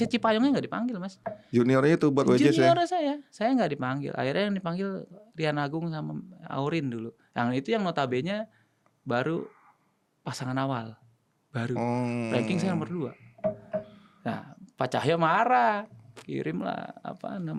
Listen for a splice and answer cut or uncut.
uncut